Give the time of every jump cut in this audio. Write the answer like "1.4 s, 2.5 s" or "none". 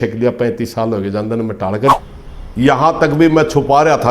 1.9 s